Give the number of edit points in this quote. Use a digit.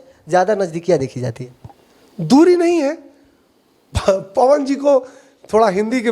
0